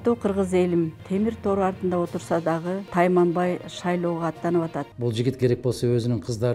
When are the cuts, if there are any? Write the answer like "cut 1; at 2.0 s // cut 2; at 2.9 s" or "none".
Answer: cut 1; at 1.0 s // cut 2; at 2.8 s // cut 3; at 4.9 s